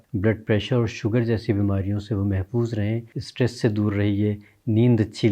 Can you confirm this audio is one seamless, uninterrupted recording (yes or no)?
no